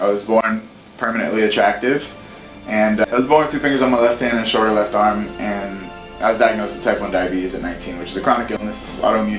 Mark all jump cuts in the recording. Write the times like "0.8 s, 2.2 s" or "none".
3.1 s

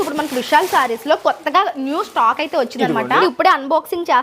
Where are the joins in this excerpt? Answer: 3.2 s

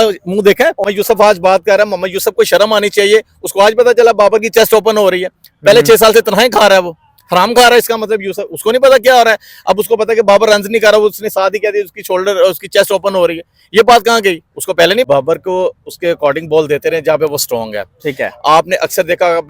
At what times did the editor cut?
0.8 s, 15.0 s

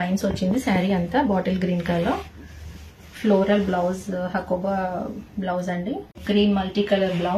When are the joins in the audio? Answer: 6.2 s

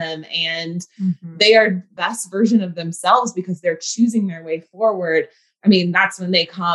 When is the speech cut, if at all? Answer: 1.9 s, 5.4 s

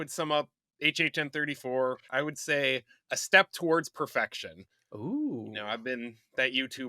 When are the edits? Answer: 2.0 s

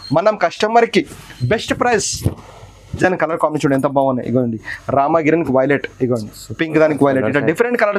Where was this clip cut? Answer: 3.0 s

